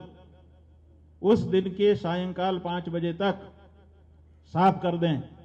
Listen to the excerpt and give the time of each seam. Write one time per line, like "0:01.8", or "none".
none